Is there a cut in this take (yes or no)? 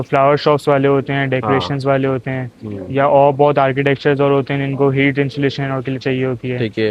no